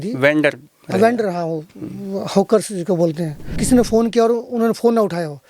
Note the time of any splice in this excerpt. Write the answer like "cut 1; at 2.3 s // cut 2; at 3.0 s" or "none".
cut 1; at 3.6 s